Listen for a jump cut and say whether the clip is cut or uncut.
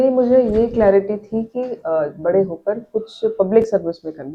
uncut